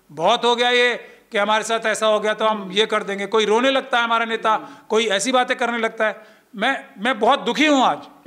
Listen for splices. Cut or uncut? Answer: uncut